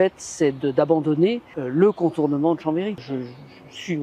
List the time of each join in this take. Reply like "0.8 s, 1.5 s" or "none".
1.5 s, 3.0 s

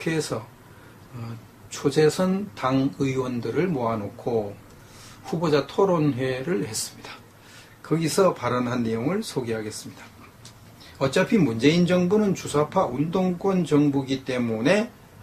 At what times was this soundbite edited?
none

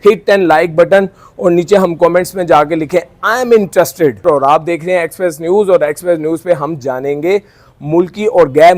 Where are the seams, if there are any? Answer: 4.2 s

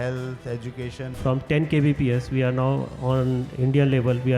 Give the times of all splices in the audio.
1.1 s

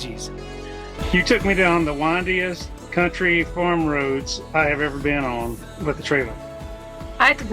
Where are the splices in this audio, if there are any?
1.0 s

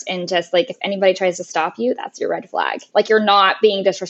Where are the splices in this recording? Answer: 2.8 s

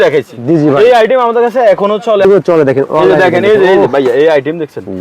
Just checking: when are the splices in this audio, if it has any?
2.2 s

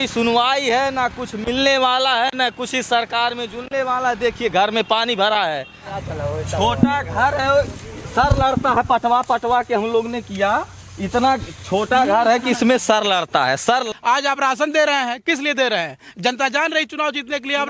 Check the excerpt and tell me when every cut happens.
6.0 s, 13.8 s

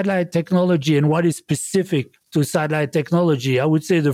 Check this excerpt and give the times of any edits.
2.2 s

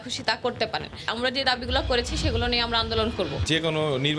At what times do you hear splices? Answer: 1.1 s, 3.4 s

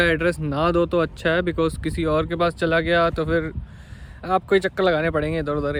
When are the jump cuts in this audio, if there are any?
none

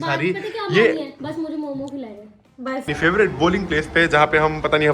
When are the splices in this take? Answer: 2.8 s

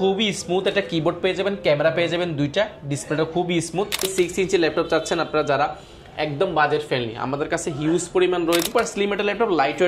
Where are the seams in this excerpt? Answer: 4.1 s, 8.7 s

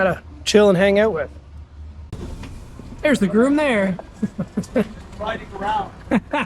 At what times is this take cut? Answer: 2.0 s

